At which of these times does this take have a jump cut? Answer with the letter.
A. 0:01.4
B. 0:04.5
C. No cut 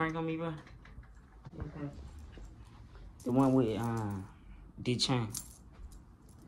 A